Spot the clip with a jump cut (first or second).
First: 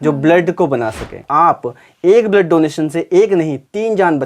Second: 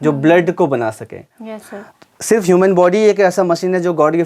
first